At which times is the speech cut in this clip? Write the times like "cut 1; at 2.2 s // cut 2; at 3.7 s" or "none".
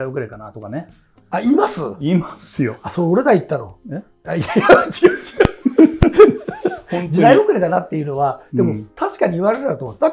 none